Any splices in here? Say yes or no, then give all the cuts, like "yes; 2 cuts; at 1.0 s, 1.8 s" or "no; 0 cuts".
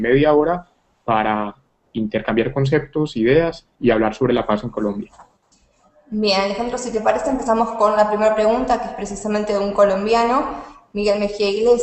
yes; 1 cut; at 3.6 s